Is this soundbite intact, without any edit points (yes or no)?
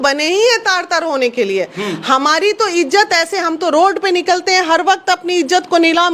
yes